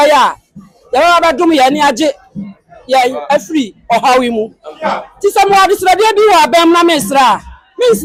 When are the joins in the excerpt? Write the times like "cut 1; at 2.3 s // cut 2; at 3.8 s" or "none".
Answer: none